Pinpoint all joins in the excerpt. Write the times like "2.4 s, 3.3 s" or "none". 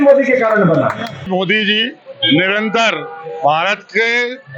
1.2 s

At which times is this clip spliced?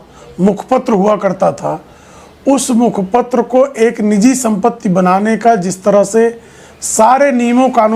none

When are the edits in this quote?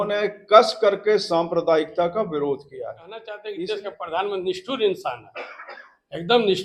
3.4 s

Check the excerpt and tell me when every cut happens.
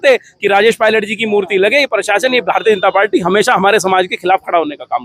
none

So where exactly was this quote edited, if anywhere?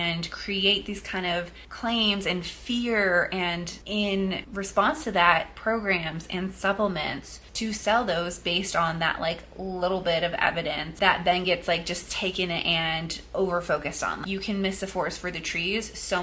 10.9 s, 14.2 s

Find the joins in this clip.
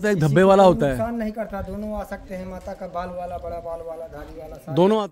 none

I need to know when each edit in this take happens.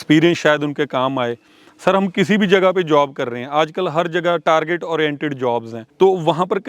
5.8 s

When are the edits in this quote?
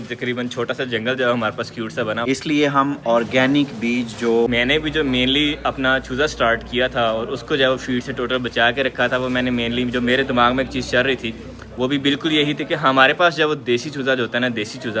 2.2 s, 4.5 s

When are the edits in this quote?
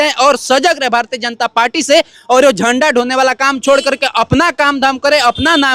none

